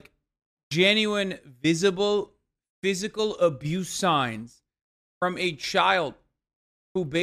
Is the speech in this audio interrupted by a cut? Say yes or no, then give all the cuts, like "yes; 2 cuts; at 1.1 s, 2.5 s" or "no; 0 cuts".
no; 0 cuts